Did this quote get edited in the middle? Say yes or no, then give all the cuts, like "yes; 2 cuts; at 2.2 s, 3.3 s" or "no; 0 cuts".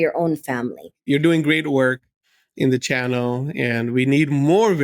yes; 1 cut; at 1.0 s